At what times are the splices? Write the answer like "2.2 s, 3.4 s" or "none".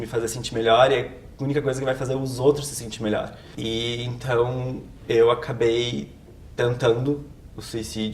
3.4 s